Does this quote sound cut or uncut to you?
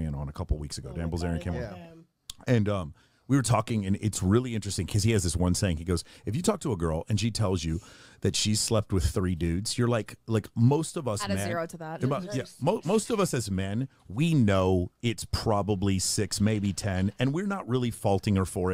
uncut